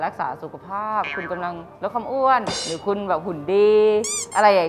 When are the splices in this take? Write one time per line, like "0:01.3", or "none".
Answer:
none

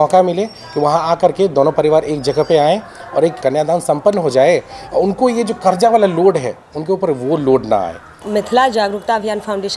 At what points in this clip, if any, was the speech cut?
0:03.4
0:08.2

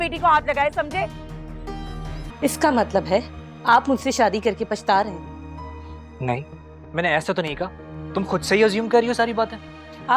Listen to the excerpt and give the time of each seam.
0:02.2

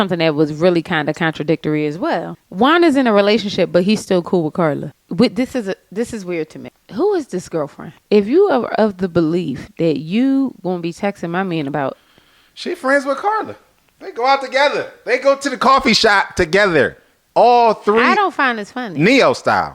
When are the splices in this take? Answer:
0:02.4
0:06.6

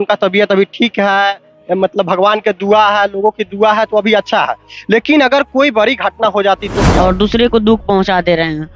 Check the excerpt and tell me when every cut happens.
0:06.8

